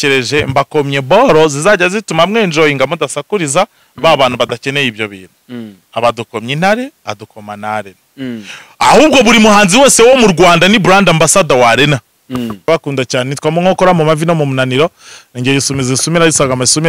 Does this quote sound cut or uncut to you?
cut